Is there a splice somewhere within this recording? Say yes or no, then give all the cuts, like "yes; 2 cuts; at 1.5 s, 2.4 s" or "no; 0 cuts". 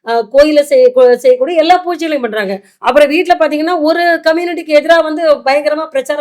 no; 0 cuts